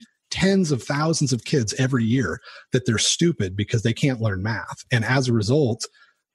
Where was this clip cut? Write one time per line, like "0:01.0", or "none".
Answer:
none